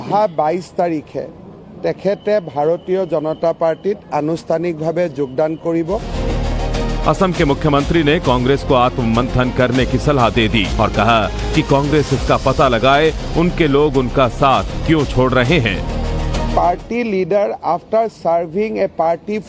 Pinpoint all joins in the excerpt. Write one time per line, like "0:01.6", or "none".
none